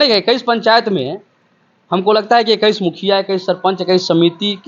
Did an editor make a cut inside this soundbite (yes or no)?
no